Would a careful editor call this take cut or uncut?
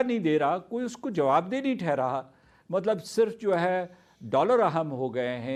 uncut